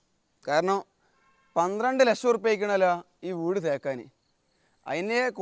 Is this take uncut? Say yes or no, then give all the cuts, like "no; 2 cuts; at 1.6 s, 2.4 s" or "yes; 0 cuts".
yes; 0 cuts